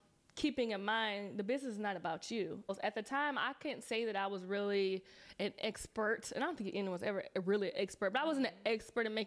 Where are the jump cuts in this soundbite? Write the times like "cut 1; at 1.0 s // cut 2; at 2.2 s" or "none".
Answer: cut 1; at 2.7 s

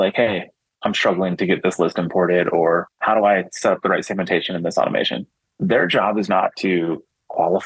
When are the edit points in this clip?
cut 1; at 2.9 s

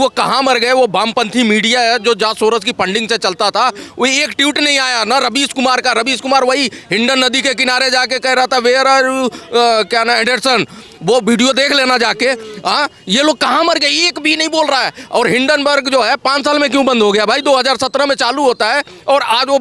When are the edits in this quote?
none

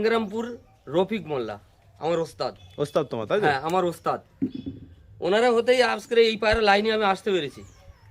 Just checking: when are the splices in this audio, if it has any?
none

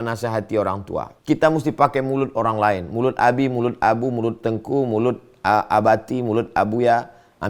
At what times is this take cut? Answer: cut 1; at 1.1 s

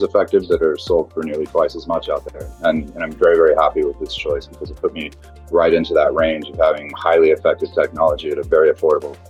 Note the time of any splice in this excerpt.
none

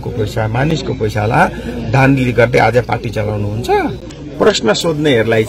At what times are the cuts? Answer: cut 1; at 4.1 s

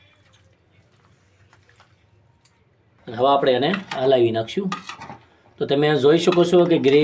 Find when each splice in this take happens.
cut 1; at 3.0 s

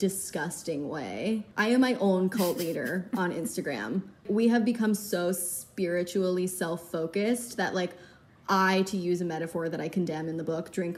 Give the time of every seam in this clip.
cut 1; at 1.5 s // cut 2; at 4.2 s

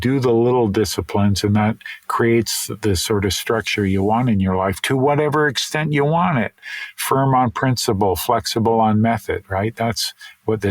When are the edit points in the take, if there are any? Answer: none

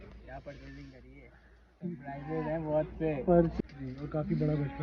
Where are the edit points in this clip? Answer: cut 1; at 3.5 s

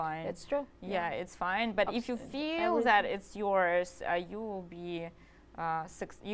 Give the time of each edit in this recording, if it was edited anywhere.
none

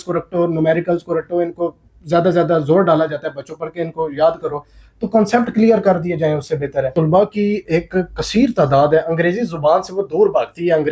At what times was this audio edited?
cut 1; at 6.9 s

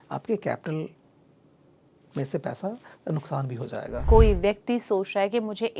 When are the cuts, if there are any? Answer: cut 1; at 4.0 s

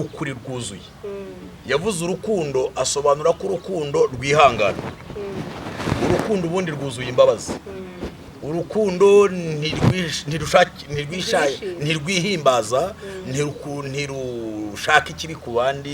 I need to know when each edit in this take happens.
none

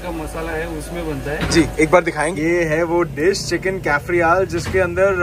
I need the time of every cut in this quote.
none

